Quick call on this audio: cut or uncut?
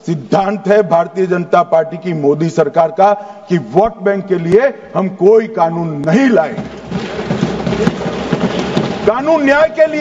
uncut